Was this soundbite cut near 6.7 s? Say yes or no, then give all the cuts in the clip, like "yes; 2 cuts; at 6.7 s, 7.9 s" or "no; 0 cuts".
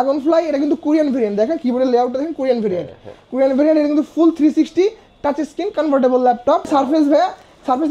yes; 1 cut; at 6.7 s